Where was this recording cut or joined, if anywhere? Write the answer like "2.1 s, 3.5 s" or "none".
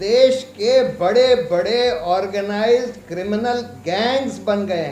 none